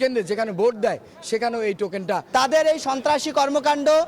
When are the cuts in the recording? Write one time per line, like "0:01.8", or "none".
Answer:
0:02.2